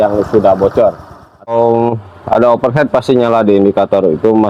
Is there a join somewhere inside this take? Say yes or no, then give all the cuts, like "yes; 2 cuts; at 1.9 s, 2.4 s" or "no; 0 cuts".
yes; 1 cut; at 1.5 s